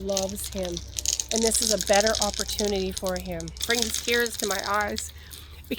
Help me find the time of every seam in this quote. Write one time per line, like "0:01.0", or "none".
0:03.5